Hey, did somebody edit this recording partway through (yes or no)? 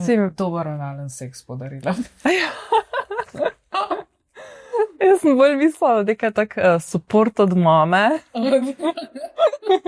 no